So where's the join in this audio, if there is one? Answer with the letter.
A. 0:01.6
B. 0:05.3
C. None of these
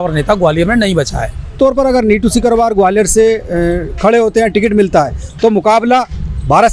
A